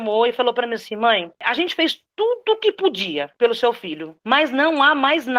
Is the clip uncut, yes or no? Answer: yes